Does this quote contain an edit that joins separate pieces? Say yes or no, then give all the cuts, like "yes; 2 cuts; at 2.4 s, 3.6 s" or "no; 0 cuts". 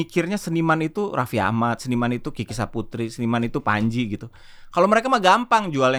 no; 0 cuts